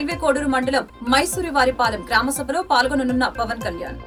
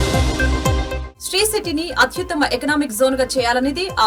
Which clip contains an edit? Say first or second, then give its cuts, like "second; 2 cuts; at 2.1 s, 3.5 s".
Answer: second; 1 cut; at 1.0 s